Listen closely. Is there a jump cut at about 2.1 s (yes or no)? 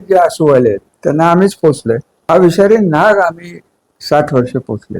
yes